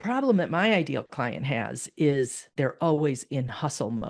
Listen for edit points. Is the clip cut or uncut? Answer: cut